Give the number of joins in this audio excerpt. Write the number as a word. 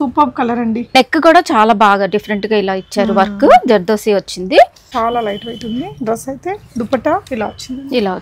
two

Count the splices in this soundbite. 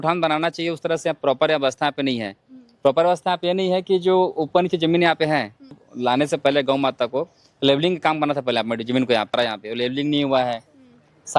two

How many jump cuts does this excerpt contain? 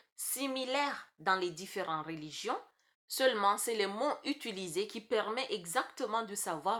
zero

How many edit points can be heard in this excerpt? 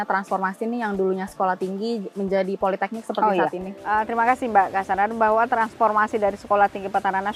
zero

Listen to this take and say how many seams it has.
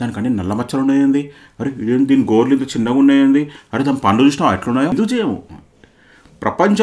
one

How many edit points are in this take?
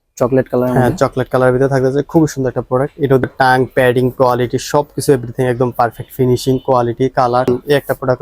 two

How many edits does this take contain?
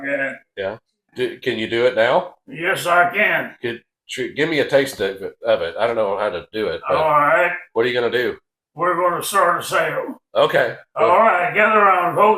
one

